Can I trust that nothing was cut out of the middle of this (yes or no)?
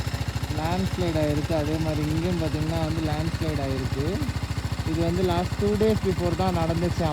yes